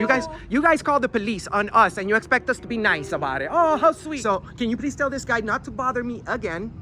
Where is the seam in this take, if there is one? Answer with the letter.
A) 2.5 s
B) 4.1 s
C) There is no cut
B